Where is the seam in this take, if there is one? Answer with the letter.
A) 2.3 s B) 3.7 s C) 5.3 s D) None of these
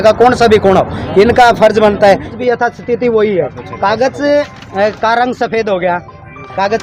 A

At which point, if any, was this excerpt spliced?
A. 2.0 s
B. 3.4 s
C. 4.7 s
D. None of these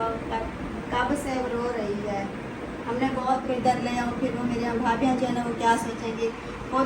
B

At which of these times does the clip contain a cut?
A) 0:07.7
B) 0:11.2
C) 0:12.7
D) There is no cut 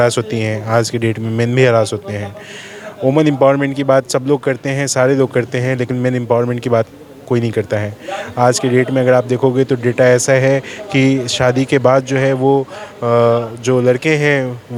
D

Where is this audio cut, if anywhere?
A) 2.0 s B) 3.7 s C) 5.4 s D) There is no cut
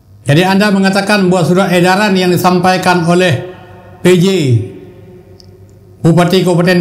D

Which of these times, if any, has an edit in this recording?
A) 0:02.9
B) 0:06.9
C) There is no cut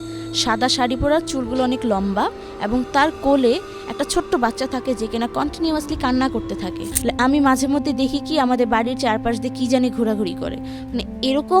B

